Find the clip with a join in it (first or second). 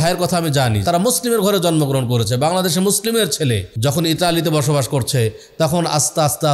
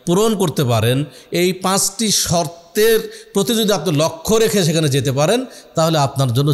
first